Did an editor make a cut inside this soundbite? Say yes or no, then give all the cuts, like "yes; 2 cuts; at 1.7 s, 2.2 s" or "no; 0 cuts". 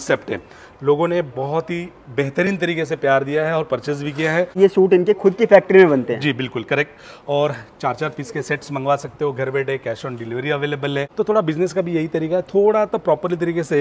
yes; 2 cuts; at 4.6 s, 11.1 s